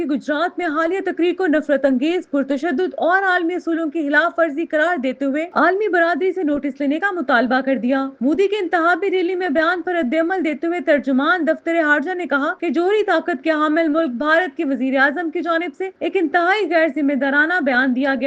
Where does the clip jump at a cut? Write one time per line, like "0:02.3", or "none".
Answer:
none